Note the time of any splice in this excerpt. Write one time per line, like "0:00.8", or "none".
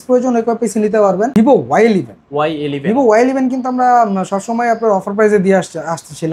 0:01.3